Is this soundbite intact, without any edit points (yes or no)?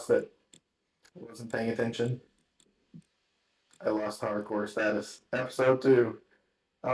no